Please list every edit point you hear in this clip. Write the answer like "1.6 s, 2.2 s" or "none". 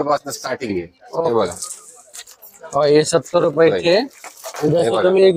none